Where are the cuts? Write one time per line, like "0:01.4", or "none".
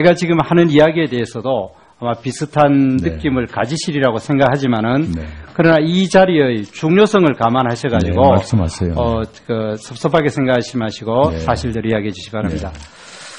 0:04.8